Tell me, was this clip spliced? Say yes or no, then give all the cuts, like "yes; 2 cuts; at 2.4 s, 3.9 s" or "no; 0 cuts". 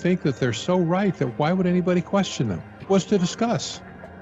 yes; 1 cut; at 2.8 s